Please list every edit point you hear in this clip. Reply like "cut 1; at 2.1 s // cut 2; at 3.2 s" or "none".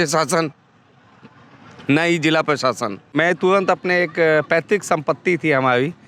cut 1; at 2.9 s